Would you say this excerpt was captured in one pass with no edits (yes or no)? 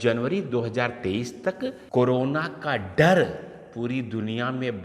no